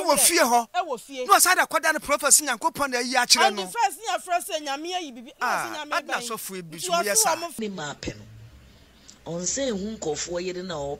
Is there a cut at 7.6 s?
yes; 1 cut; at 7.6 s

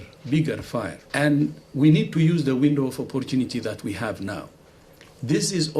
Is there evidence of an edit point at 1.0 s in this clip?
no; 0 cuts

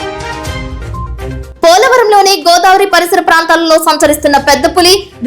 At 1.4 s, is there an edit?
yes; 1 cut; at 1.4 s

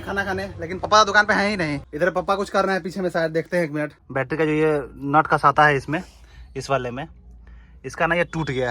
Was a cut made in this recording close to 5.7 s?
no; 2 cuts; at 1.9 s, 4.0 s

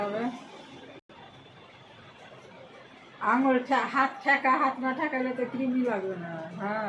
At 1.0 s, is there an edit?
no; 0 cuts

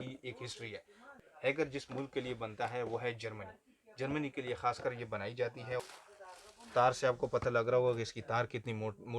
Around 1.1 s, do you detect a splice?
yes; 2 cuts; at 1.1 s, 5.8 s

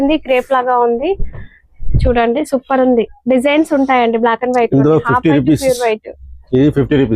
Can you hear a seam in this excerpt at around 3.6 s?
no; 0 cuts

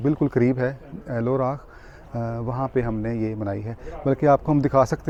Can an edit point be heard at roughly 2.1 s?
no; 0 cuts

